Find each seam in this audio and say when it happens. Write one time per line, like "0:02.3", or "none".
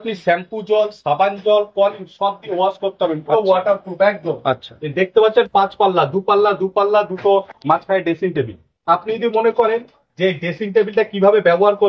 none